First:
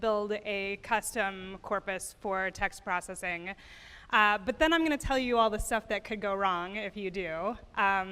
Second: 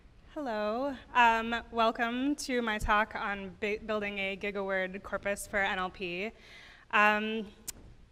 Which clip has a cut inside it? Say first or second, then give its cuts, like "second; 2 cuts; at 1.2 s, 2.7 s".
first; 1 cut; at 2.1 s